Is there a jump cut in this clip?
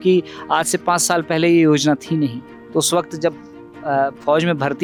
no; 0 cuts

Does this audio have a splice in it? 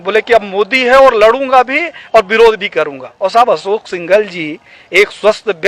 yes; 1 cut; at 3.0 s

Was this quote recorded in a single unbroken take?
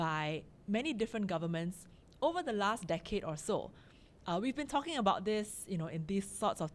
yes; 0 cuts

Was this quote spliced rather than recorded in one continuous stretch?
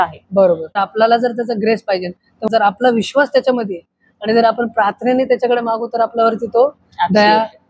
yes; 2 cuts; at 0.8 s, 2.5 s

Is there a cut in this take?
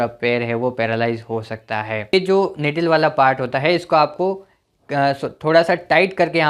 yes; 1 cut; at 2.1 s

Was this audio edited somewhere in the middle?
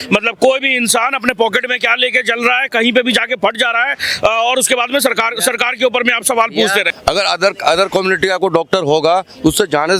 yes; 1 cut; at 6.9 s

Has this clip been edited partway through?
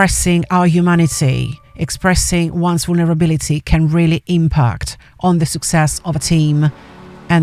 no; 0 cuts

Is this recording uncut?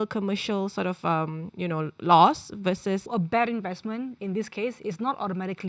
no; 1 cut; at 3.1 s

